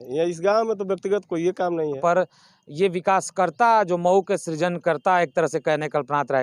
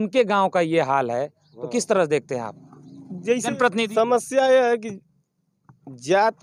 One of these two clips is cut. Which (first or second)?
first